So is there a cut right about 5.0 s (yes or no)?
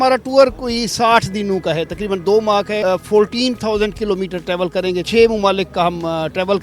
yes